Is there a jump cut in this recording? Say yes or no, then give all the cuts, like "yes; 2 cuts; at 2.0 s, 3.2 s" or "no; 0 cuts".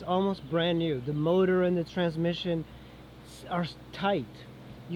no; 0 cuts